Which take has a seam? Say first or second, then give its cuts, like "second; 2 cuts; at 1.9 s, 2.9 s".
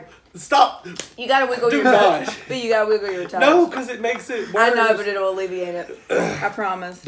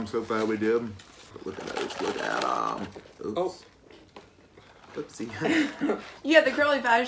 second; 2 cuts; at 1.3 s, 6.1 s